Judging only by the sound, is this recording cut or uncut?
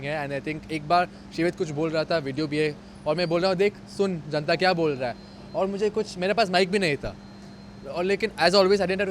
uncut